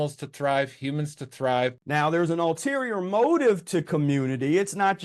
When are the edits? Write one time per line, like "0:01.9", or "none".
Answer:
0:01.8